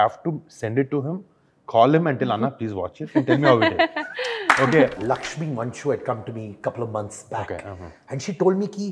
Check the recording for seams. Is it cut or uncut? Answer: cut